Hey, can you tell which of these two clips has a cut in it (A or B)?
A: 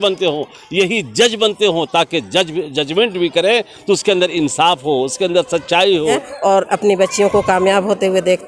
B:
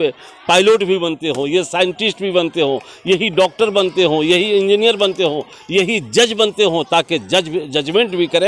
A